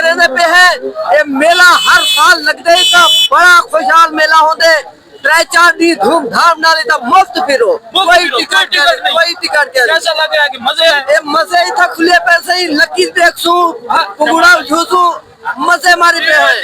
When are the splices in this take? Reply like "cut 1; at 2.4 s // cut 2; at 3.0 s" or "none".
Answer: none